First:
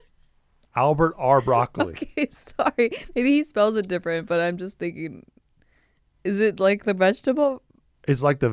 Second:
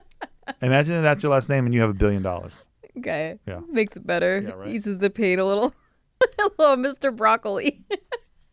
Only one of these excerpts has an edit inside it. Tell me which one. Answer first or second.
second